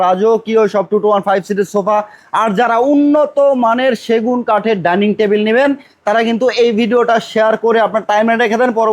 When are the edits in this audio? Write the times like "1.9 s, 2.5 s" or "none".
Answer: none